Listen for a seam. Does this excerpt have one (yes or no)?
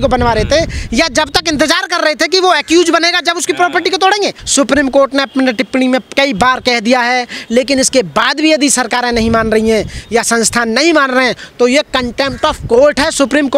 yes